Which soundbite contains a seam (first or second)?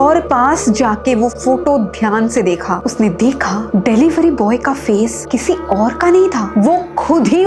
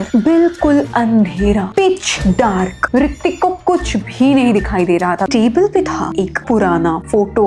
second